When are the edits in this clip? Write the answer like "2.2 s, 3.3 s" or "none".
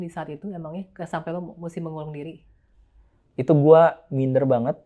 none

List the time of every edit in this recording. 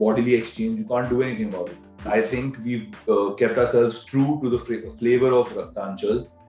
2.0 s

